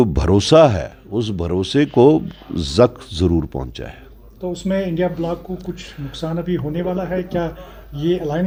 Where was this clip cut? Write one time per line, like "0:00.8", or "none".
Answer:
none